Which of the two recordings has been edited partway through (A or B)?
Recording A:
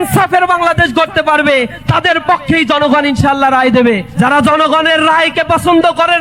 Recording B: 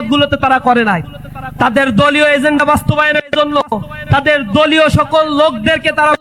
A